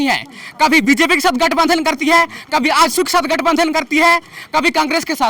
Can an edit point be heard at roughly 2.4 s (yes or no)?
no